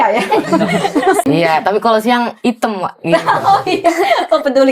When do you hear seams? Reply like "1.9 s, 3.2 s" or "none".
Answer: 1.2 s